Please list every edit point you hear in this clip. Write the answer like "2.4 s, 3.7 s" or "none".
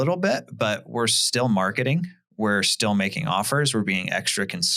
none